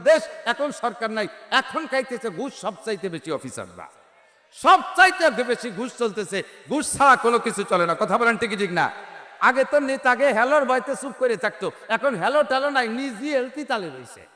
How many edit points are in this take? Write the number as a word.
zero